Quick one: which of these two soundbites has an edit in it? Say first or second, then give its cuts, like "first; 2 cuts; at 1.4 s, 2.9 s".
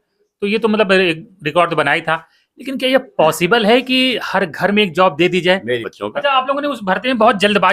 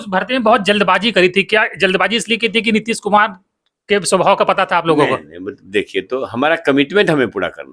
first; 1 cut; at 5.8 s